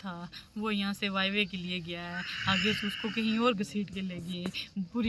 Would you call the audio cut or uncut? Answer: uncut